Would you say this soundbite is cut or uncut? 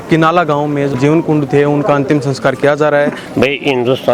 cut